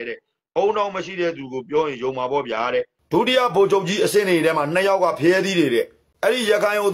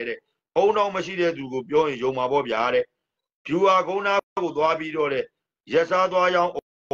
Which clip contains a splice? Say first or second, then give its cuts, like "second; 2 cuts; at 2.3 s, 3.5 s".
first; 2 cuts; at 3.0 s, 6.0 s